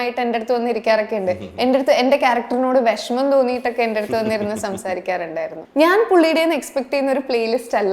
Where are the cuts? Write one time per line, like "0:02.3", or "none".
0:05.6